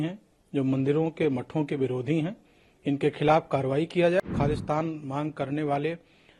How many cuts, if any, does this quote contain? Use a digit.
1